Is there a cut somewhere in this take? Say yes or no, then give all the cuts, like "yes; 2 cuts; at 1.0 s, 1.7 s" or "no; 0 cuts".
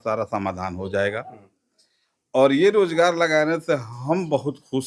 no; 0 cuts